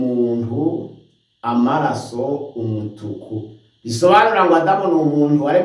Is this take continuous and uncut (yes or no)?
yes